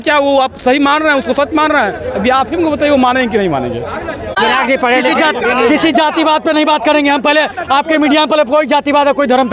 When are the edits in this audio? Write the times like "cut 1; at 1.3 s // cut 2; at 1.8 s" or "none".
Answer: cut 1; at 4.4 s